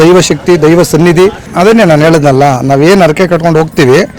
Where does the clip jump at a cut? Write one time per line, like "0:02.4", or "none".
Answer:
0:01.5